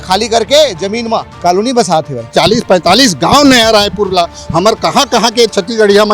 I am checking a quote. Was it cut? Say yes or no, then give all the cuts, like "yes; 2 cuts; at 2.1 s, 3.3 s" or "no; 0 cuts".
yes; 2 cuts; at 1.3 s, 2.3 s